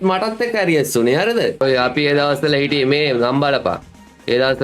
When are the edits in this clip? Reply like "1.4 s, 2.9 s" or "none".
1.6 s